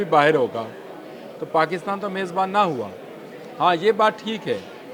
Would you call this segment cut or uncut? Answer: uncut